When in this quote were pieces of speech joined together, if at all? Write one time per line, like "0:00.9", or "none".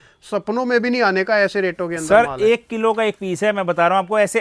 none